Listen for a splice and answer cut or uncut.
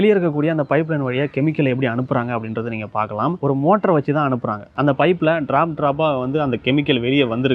cut